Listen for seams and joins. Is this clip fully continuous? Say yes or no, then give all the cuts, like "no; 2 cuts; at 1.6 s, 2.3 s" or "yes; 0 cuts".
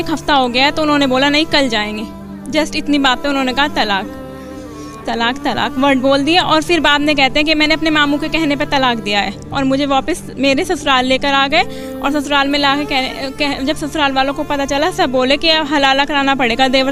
yes; 0 cuts